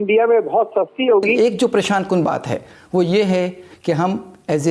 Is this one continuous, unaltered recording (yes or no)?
no